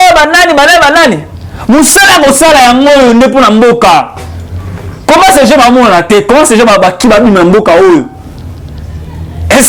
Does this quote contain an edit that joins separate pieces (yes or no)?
no